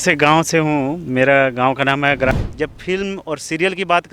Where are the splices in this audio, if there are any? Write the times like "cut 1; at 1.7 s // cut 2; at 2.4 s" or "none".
cut 1; at 2.3 s